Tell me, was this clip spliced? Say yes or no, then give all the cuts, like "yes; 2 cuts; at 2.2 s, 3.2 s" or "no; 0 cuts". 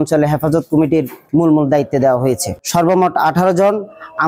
yes; 1 cut; at 2.6 s